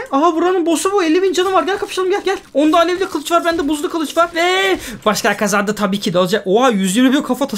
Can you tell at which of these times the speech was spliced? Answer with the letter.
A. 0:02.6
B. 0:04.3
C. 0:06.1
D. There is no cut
D